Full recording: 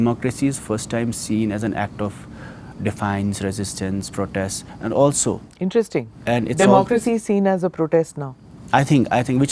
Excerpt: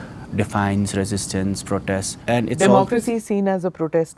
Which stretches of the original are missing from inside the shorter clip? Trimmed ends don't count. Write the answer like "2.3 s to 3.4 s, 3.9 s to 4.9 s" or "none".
4.6 s to 6.1 s